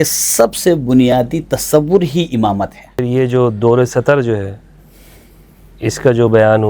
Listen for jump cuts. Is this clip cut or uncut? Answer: cut